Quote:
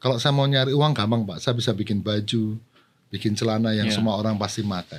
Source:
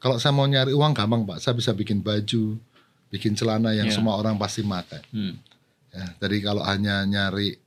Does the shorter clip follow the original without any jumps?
yes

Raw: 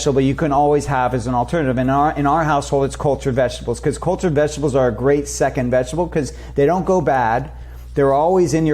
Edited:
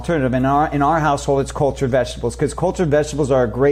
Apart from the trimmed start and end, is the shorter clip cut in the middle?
no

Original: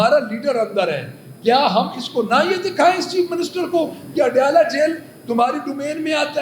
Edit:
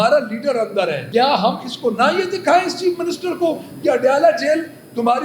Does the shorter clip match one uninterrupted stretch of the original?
no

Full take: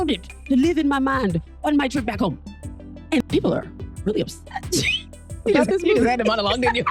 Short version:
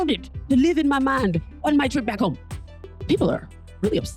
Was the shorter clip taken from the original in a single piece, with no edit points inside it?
no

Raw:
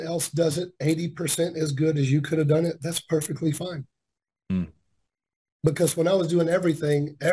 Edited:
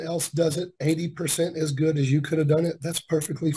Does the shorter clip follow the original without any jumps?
yes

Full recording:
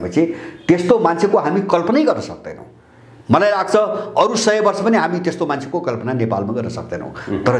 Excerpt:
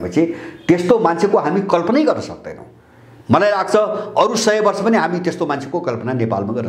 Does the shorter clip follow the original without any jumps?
yes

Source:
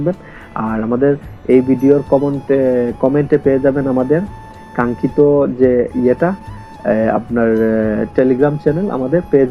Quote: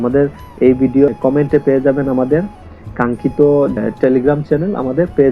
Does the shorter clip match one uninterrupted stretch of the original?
no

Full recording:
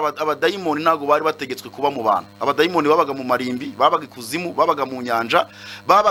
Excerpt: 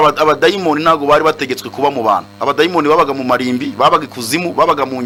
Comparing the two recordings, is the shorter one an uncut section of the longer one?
yes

